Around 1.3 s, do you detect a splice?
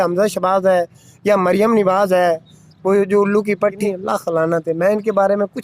no; 1 cut; at 3.8 s

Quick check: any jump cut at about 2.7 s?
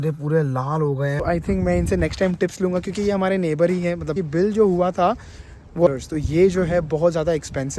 no; 3 cuts; at 1.2 s, 4.2 s, 5.9 s

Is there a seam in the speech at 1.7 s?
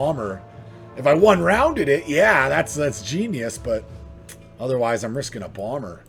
no; 0 cuts

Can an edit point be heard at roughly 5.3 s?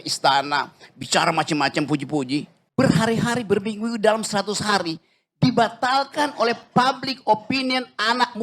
no; 1 cut; at 2.6 s

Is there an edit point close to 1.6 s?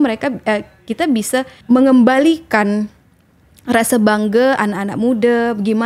yes; 1 cut; at 1.6 s

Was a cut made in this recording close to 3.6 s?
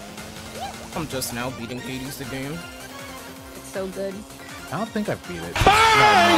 no; 1 cut; at 5.5 s

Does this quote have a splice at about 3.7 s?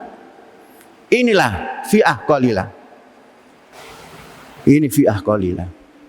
yes; 1 cut; at 3.7 s

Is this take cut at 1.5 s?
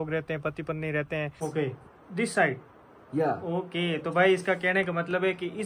yes; 1 cut; at 1.5 s

